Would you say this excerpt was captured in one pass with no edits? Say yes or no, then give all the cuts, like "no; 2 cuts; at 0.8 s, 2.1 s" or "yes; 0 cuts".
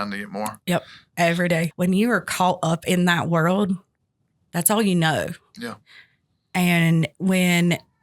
no; 1 cut; at 1.7 s